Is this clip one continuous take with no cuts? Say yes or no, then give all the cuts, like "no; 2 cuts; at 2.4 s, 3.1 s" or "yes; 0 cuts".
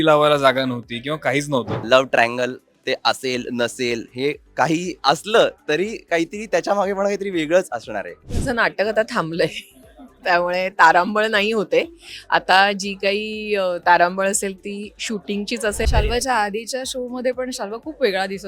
no; 4 cuts; at 1.8 s, 4.9 s, 8.3 s, 15.9 s